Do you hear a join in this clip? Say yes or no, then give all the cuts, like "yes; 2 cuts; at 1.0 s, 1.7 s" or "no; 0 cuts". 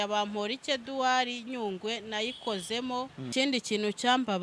yes; 1 cut; at 3.3 s